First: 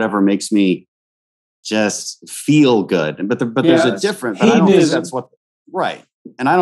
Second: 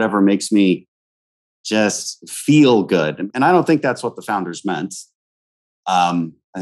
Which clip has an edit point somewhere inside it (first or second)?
second